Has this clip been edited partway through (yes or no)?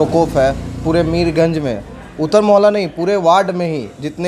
no